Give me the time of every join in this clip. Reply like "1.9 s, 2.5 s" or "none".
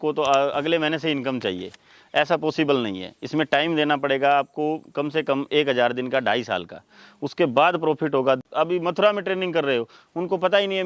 8.4 s